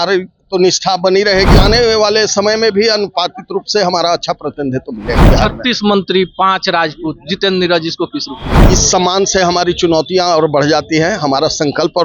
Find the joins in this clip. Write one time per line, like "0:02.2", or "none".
0:01.6
0:05.2
0:08.6